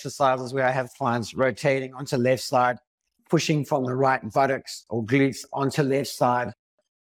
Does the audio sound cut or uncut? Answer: uncut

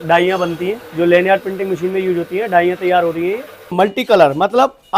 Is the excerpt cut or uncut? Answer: cut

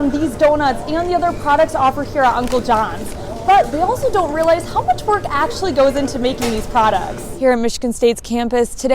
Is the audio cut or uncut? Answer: cut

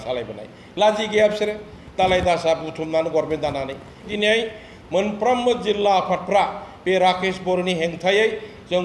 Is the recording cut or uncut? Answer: cut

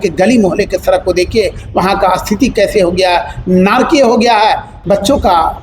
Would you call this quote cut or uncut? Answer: cut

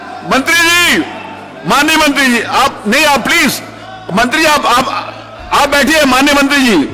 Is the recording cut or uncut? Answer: uncut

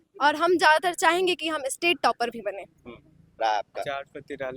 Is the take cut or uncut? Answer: cut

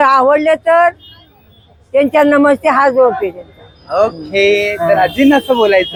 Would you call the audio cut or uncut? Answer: uncut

